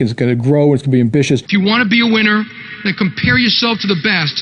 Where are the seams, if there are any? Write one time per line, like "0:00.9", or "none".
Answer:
0:01.5